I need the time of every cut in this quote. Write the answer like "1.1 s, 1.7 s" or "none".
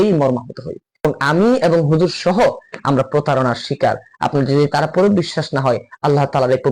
1.0 s, 4.3 s